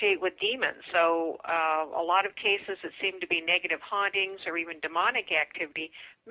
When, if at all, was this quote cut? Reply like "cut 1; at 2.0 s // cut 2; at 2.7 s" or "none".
none